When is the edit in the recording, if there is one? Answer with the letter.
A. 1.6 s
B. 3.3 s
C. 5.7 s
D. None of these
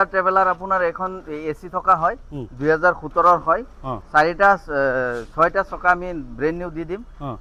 D